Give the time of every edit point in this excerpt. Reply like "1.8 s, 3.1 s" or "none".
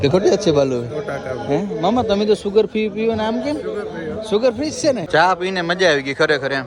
5.0 s